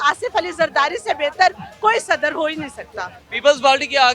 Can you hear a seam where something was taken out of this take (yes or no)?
no